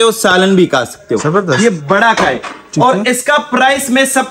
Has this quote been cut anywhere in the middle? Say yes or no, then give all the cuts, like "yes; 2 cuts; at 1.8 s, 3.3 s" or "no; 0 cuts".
no; 0 cuts